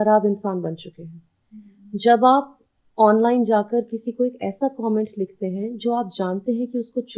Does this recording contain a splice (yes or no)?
no